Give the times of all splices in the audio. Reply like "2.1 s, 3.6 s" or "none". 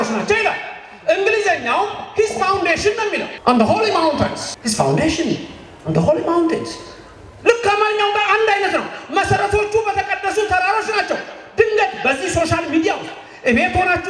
3.3 s, 4.5 s